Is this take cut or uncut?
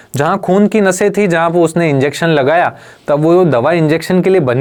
uncut